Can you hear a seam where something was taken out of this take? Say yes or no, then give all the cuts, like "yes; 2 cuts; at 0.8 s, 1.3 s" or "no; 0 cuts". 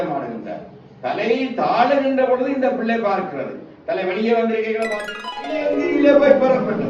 yes; 1 cut; at 5.0 s